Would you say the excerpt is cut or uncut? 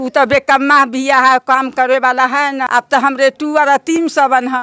cut